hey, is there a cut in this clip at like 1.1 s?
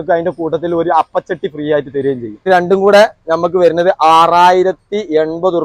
no; 1 cut; at 2.4 s

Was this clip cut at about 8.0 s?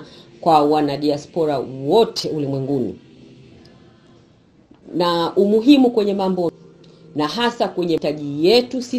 yes; 2 cuts; at 6.5 s, 8.0 s

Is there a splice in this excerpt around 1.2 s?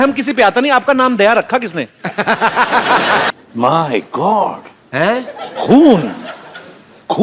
no; 1 cut; at 3.3 s

